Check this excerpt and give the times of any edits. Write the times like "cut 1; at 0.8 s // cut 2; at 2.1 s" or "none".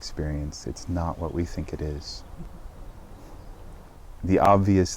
cut 1; at 4.0 s